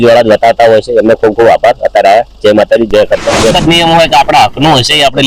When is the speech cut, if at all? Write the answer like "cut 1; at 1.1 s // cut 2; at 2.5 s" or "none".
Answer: cut 1; at 3.5 s